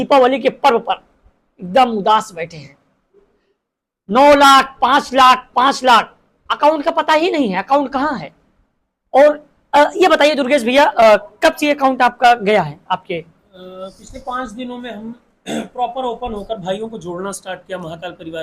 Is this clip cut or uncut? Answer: uncut